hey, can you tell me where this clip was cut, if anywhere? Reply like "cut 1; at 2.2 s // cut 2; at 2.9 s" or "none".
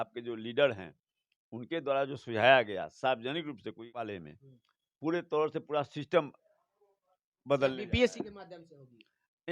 cut 1; at 4.1 s